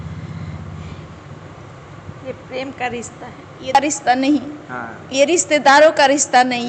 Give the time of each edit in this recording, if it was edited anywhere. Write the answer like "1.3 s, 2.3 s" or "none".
3.8 s